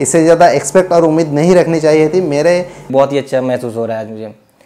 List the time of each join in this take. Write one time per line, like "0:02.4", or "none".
0:02.9